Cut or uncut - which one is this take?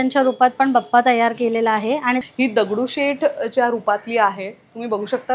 cut